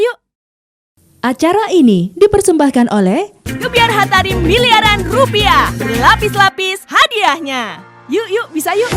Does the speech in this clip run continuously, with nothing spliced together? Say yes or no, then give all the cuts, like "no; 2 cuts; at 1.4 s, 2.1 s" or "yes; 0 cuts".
no; 1 cut; at 1.0 s